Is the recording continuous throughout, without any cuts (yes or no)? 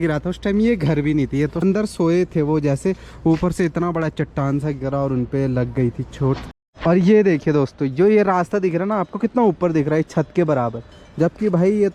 no